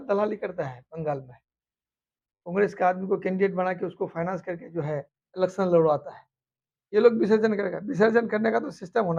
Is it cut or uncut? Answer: uncut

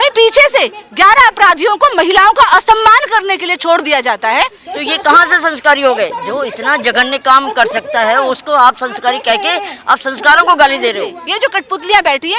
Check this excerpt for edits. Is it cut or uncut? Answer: cut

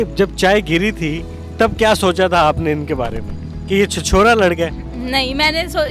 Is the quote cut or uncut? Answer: uncut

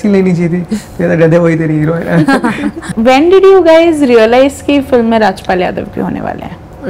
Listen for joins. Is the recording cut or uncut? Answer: uncut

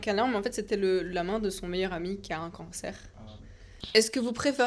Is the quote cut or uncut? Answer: cut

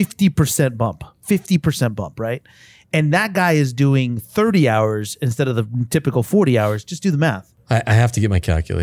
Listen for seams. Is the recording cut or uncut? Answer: cut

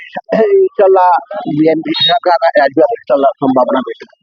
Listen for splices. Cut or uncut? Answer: uncut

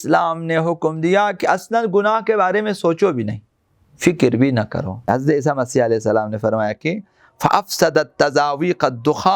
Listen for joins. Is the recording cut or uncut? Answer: cut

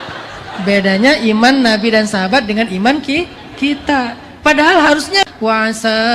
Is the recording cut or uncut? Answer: cut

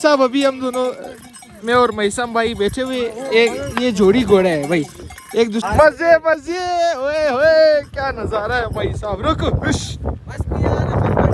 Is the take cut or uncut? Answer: cut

